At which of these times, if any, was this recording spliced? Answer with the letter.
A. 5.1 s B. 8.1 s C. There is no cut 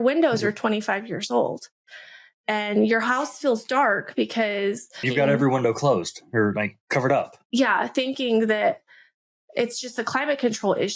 A